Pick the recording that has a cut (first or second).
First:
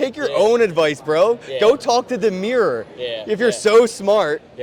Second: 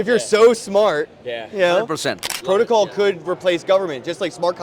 second